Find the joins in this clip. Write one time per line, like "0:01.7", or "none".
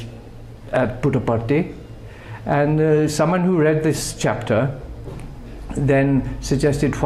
none

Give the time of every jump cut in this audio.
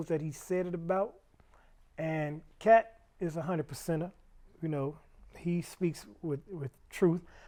none

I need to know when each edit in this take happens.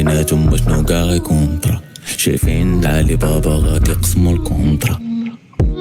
none

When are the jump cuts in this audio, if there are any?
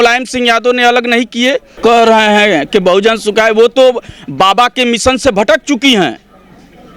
0:01.8

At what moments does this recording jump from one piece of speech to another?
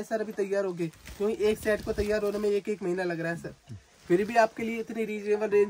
none

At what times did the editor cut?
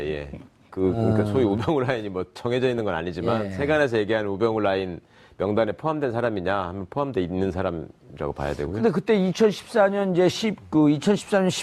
none

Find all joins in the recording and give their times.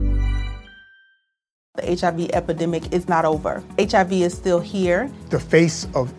0:01.5

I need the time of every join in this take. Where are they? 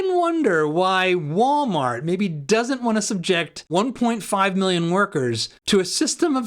0:03.6
0:05.5

